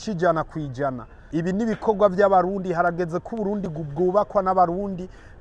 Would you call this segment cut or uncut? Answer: cut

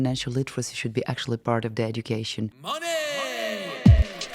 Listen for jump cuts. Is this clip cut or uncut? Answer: cut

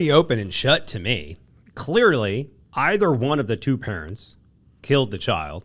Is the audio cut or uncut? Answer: cut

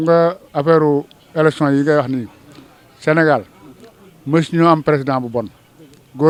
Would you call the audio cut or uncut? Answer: uncut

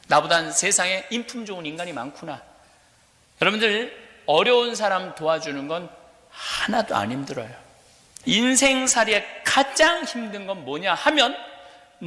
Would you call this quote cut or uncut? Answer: cut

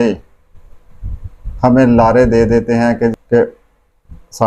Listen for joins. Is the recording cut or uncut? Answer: cut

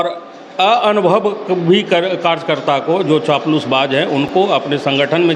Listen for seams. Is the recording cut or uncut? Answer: uncut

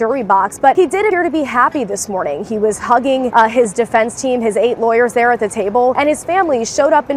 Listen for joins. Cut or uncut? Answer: cut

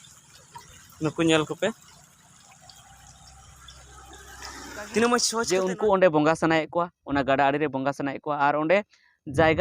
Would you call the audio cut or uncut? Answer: cut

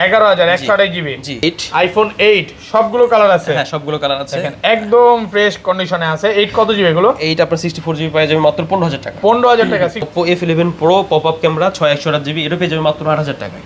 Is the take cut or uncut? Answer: cut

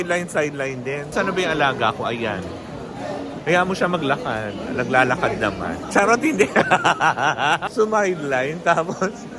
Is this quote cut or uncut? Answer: cut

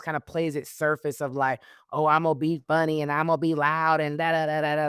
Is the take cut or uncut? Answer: uncut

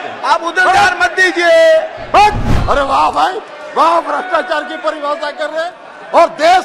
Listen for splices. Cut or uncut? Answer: cut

